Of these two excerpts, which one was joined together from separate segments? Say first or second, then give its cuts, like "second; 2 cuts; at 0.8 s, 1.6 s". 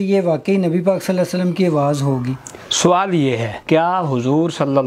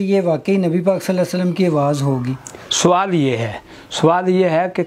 first; 1 cut; at 3.6 s